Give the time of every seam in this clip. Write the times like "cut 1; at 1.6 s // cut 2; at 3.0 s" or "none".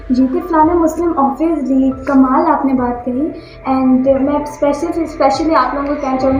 none